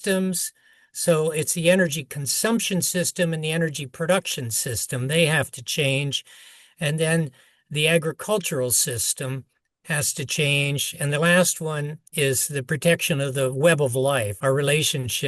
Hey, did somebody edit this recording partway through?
yes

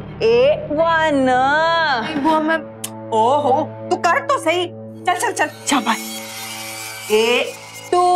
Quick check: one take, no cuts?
yes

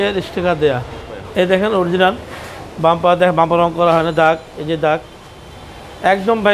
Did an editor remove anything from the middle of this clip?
yes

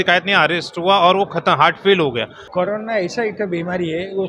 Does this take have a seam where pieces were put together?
yes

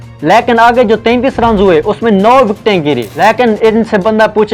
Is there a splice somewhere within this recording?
yes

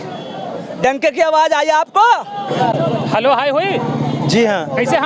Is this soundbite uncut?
no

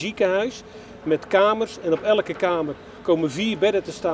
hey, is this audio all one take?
yes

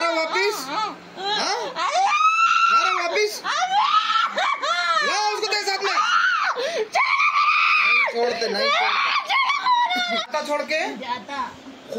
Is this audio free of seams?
no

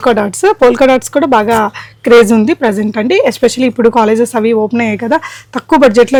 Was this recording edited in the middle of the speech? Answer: no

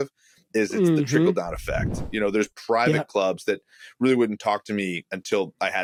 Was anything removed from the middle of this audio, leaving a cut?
no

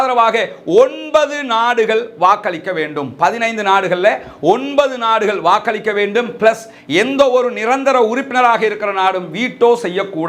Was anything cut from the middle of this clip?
no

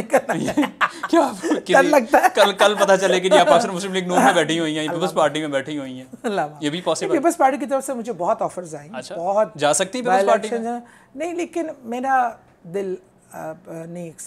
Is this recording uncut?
yes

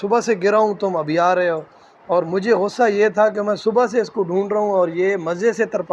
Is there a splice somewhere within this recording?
no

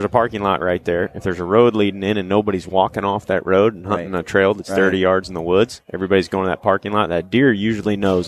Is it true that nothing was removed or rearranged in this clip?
yes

